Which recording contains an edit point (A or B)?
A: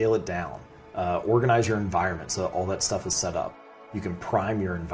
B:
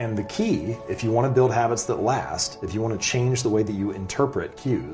A